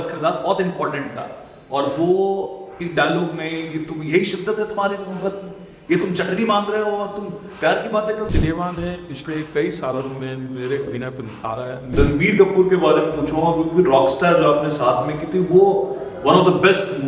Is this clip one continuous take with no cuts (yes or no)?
no